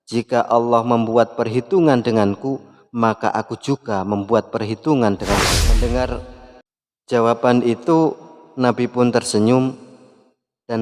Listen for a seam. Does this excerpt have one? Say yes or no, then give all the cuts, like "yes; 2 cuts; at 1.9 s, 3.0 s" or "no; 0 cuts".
yes; 1 cut; at 5.6 s